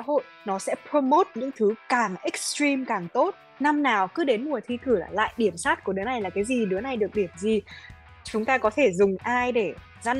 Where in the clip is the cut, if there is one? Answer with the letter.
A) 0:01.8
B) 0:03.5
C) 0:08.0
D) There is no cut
B